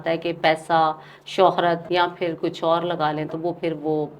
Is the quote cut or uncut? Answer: cut